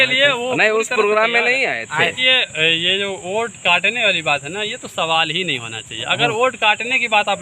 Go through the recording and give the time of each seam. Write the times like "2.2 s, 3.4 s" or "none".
2.2 s

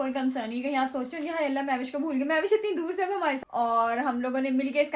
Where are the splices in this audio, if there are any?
3.4 s

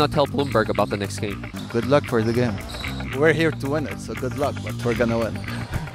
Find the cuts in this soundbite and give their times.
3.0 s

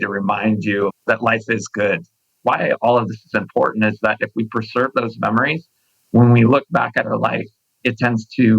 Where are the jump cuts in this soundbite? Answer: 2.3 s

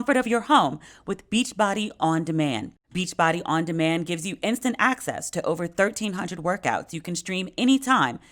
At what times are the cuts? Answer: 2.8 s

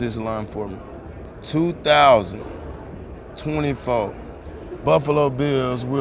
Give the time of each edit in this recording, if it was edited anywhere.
1.3 s, 4.7 s

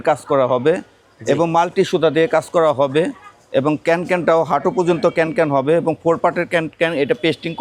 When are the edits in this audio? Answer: none

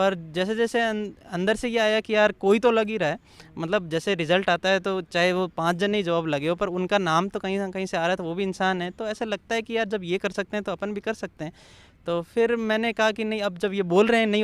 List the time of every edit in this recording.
none

